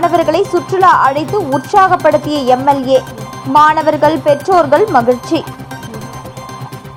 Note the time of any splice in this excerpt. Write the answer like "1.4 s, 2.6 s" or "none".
none